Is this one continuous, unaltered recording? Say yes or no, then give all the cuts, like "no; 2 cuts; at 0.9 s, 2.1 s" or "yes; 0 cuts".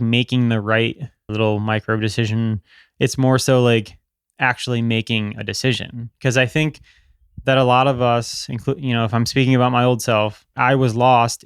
no; 2 cuts; at 1.3 s, 10.5 s